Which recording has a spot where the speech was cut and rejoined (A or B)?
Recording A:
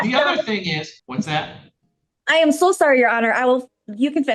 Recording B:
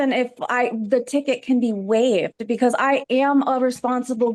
A